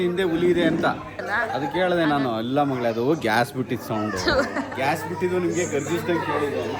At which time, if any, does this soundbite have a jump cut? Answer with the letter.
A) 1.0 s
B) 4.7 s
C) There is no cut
B